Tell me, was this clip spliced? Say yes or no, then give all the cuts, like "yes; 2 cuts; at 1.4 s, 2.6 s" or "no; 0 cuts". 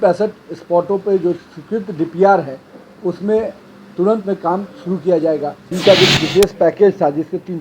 yes; 1 cut; at 5.7 s